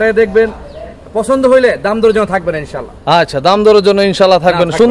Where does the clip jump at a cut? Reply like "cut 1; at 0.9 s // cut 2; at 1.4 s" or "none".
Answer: none